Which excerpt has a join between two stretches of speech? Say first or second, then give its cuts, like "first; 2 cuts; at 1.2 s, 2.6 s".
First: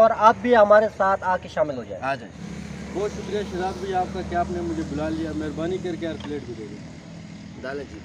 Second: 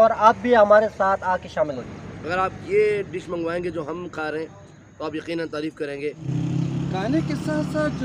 second; 2 cuts; at 1.9 s, 6.2 s